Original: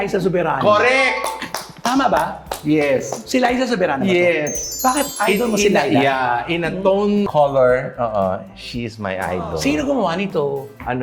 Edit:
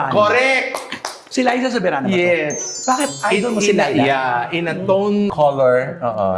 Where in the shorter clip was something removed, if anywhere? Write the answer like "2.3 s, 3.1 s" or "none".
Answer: 1.2 s